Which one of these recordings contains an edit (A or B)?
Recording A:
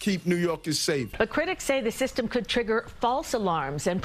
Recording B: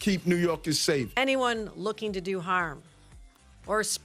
B